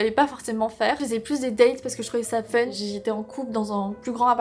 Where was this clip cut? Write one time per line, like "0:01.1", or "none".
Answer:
0:01.0
0:02.7